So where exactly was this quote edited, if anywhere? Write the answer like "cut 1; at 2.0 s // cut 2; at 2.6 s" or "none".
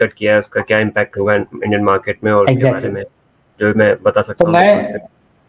none